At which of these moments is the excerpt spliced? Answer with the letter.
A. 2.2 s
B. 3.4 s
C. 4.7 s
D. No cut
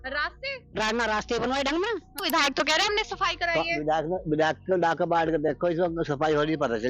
A